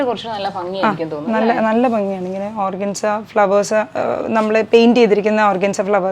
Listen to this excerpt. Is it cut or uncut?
uncut